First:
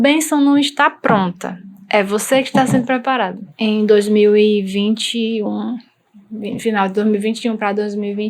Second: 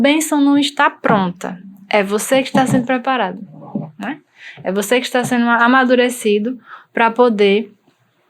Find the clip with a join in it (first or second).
first